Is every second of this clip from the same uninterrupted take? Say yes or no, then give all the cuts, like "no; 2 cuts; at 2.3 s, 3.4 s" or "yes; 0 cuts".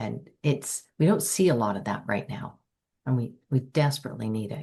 yes; 0 cuts